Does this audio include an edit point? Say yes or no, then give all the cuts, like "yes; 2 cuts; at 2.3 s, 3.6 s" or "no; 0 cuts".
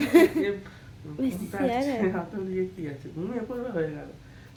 no; 0 cuts